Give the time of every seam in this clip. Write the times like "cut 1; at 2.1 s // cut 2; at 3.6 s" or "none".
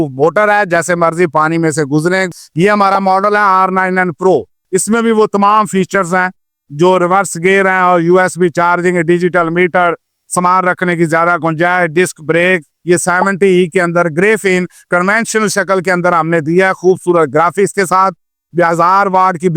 cut 1; at 2.3 s // cut 2; at 12.7 s